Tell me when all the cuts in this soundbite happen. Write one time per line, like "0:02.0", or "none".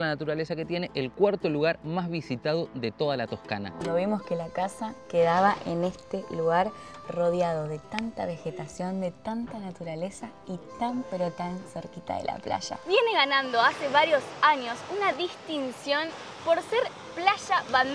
0:03.9
0:12.7